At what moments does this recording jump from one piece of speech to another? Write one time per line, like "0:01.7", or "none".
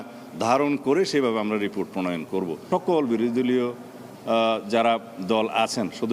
0:02.6